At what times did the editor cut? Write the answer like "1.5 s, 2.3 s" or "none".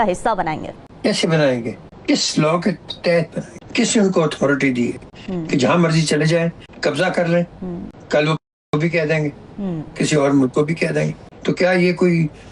none